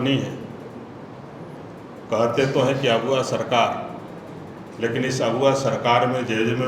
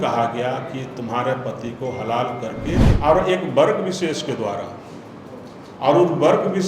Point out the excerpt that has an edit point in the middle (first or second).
second